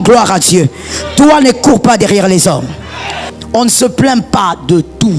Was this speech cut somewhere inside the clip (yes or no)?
yes